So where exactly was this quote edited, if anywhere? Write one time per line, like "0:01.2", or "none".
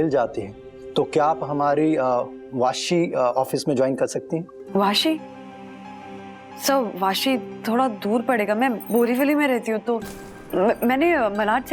none